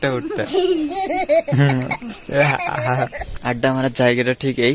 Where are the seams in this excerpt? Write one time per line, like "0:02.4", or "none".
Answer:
0:03.3